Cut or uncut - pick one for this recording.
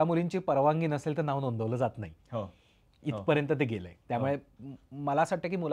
uncut